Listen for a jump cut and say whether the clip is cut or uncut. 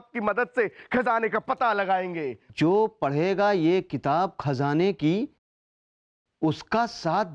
cut